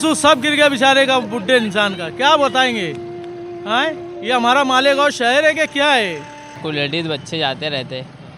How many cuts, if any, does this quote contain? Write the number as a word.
one